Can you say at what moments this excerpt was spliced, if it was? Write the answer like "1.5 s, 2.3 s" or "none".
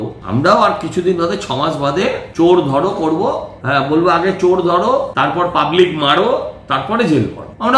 none

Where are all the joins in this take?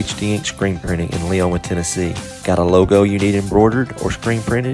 none

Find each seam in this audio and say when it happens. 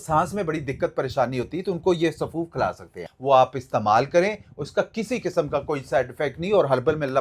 3.0 s

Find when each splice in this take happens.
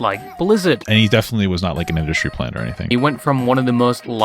0.8 s, 2.9 s

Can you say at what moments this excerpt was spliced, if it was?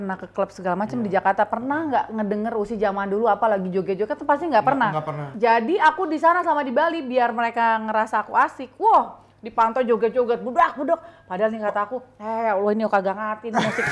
none

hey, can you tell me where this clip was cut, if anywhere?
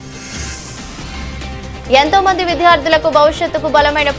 1.1 s

